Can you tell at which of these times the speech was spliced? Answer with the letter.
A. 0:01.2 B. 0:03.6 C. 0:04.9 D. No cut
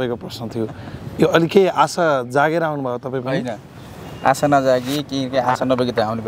D